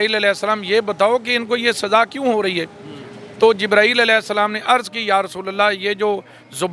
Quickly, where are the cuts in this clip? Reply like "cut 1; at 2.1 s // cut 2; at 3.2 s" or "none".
none